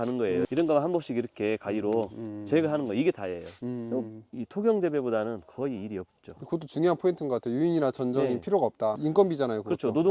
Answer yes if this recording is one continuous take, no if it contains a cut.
yes